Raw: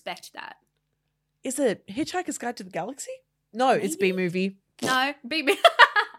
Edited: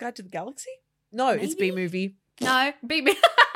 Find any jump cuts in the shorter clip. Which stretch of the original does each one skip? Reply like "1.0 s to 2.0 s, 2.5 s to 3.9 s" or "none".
none

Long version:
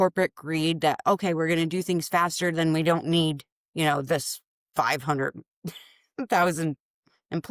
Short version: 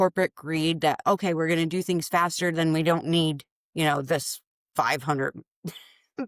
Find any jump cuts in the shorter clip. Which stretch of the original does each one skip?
none

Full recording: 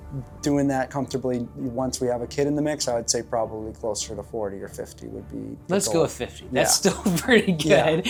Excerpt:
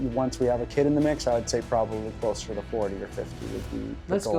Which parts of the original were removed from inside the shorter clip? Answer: none

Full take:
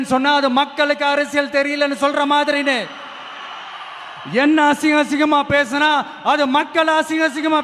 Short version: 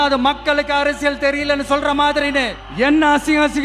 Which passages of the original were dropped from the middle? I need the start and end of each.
2.9 s to 4.2 s

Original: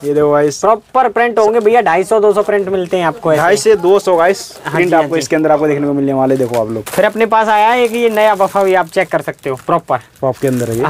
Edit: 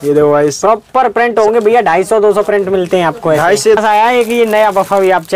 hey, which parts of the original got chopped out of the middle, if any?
3.8 s to 7.4 s

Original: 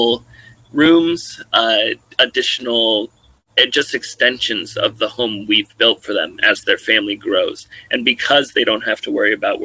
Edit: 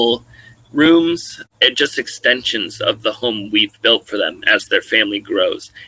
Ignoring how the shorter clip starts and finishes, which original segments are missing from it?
1.4 s to 3.3 s

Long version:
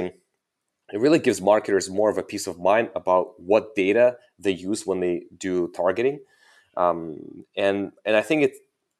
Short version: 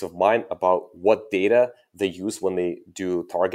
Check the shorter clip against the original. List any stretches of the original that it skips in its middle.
none

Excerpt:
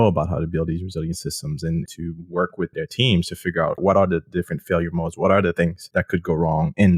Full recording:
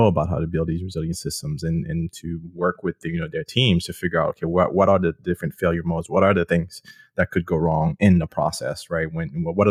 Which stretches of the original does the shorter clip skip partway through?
1.9 s to 2.1 s, 3.0 s to 3.3 s, 4.4 s to 4.7 s, 6.7 s to 7.0 s

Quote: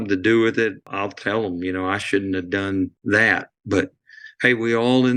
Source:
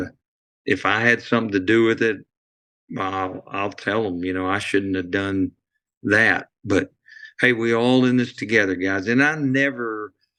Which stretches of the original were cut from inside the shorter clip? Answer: 2.3 s to 3.5 s, 5.6 s to 6.0 s

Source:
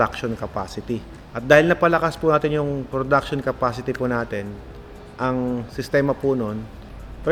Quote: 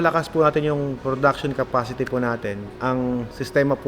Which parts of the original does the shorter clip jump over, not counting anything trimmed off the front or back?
4.6 s to 5.1 s

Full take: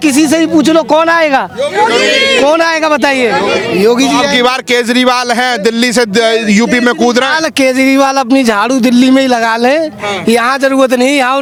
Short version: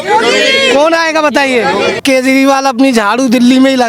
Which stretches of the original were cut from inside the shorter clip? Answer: 3.7 s to 7.5 s

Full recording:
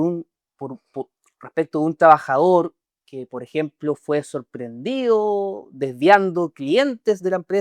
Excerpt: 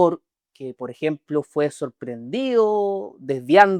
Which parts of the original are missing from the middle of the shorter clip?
none

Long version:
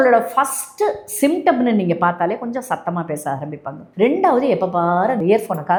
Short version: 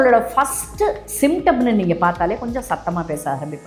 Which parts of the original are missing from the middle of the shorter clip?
none

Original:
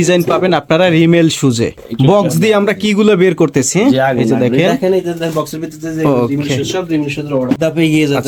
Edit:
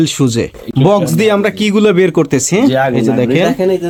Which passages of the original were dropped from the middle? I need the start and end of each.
none

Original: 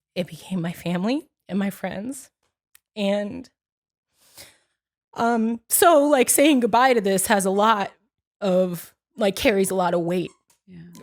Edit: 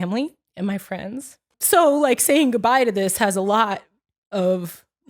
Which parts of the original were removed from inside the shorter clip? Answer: 2.5 s to 5.7 s

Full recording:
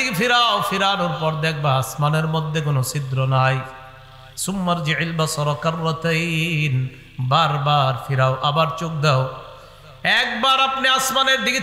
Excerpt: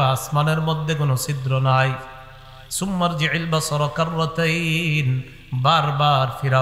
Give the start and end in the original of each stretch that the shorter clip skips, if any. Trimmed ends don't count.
none

